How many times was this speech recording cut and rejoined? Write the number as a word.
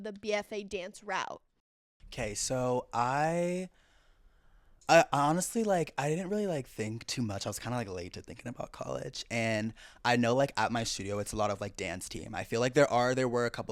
zero